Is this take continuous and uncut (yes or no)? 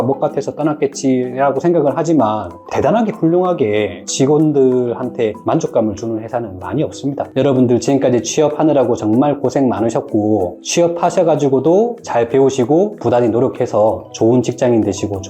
no